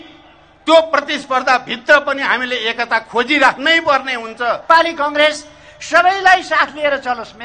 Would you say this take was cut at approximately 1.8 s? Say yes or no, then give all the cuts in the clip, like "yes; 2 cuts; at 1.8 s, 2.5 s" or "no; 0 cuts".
no; 1 cut; at 4.6 s